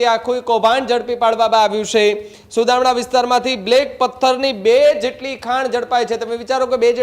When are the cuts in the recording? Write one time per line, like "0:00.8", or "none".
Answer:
none